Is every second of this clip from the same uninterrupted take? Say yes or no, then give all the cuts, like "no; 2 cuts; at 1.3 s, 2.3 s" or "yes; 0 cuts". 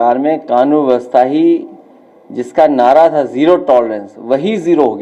yes; 0 cuts